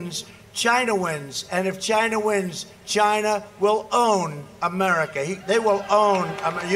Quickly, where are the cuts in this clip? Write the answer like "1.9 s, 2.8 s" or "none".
none